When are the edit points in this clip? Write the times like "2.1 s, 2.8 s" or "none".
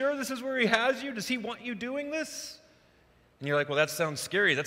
none